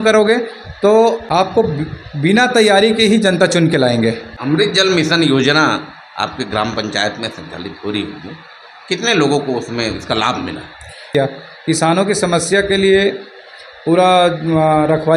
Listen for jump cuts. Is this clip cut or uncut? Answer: cut